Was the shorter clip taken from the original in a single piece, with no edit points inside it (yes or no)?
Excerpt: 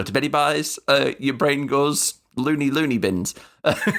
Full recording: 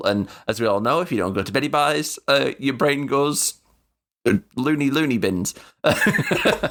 no